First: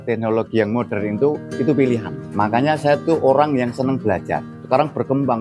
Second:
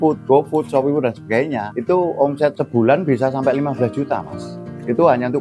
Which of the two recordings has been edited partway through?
first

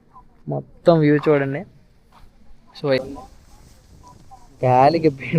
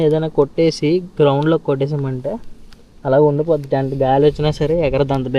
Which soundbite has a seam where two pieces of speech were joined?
first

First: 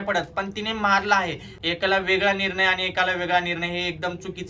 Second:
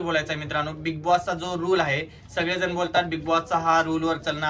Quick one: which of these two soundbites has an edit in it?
first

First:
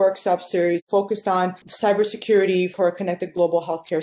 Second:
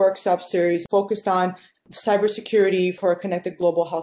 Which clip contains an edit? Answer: first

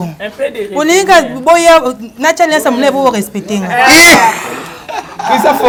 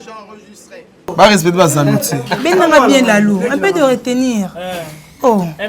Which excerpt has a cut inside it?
second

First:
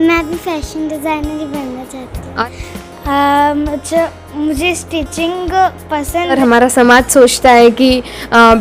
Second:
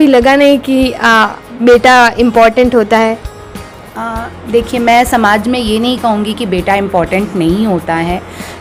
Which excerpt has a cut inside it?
first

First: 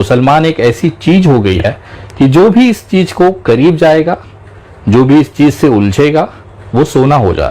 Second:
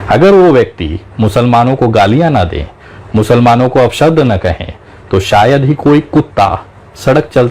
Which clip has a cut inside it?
first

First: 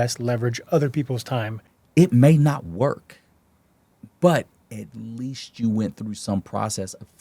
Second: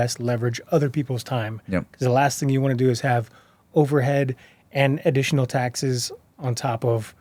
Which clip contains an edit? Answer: first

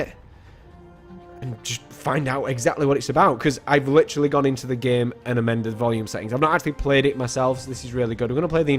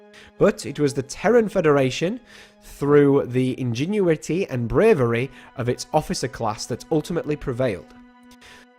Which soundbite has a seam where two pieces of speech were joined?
second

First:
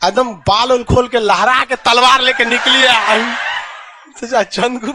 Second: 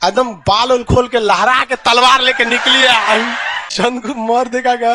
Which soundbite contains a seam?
second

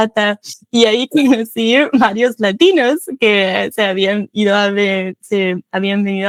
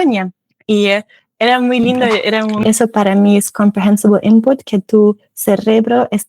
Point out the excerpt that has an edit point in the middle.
second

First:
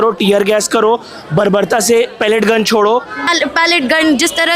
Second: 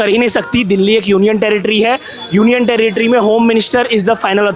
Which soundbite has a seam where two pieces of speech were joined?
first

